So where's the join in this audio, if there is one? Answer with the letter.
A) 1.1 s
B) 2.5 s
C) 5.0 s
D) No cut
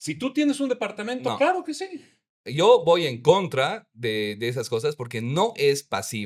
D